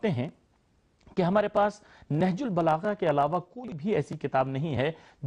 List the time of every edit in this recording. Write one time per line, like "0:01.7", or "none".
none